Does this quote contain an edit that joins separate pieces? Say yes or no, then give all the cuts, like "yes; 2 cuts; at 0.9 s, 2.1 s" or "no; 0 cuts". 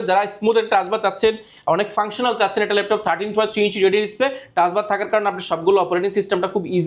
no; 0 cuts